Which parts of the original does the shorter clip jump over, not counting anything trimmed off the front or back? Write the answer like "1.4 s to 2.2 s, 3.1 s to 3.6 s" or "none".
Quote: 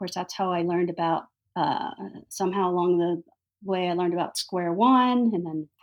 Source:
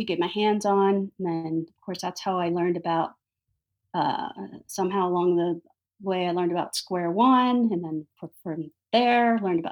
3.2 s to 3.8 s